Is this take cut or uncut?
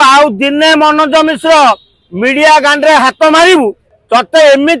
cut